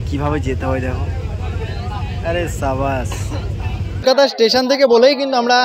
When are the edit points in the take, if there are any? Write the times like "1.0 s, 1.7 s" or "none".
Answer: 4.0 s